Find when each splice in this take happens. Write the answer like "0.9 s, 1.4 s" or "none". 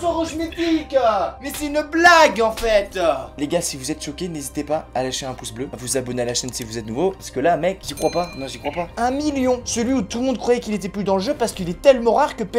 3.3 s, 7.8 s, 8.9 s